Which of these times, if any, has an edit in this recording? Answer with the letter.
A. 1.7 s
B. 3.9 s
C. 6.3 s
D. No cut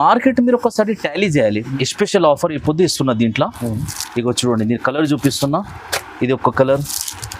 A